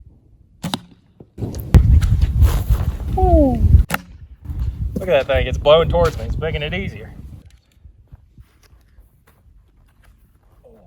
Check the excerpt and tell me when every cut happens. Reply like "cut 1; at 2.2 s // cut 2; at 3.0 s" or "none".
cut 1; at 1.7 s